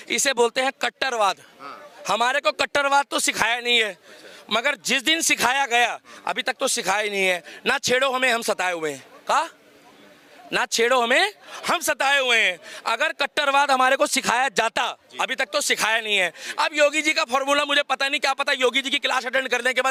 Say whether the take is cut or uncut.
uncut